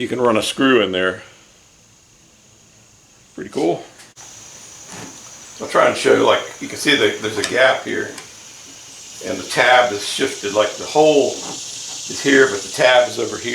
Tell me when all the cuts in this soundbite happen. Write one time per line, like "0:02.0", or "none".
0:04.0